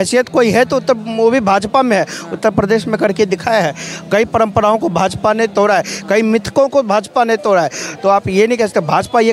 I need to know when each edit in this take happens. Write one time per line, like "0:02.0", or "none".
none